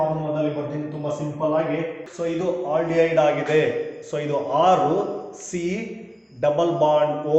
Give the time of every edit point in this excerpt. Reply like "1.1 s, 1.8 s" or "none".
2.0 s